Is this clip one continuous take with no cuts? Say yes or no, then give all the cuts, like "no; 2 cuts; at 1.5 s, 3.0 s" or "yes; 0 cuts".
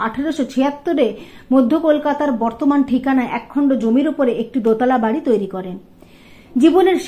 yes; 0 cuts